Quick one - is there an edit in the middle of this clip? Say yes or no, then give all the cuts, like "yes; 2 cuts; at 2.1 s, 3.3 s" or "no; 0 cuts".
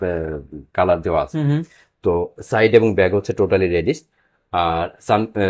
no; 0 cuts